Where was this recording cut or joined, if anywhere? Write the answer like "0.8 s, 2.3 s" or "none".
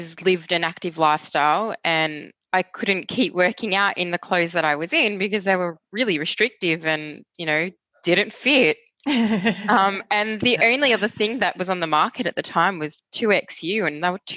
2.3 s